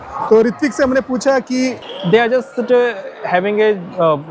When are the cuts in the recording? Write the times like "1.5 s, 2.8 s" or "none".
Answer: 1.8 s